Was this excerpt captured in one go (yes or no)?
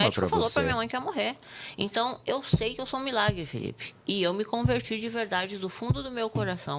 yes